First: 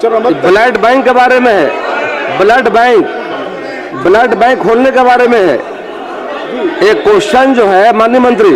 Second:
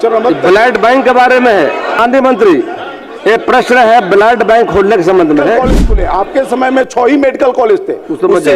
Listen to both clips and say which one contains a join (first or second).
second